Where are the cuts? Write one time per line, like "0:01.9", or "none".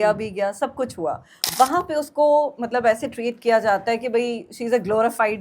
0:01.3